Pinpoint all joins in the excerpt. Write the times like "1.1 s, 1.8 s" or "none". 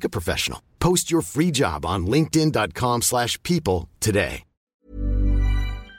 4.7 s